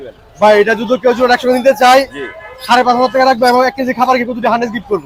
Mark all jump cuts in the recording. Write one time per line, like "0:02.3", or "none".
none